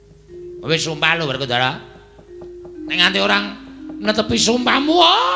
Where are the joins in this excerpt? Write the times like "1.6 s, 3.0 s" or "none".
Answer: none